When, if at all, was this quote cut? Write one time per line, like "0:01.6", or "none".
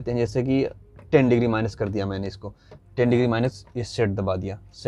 none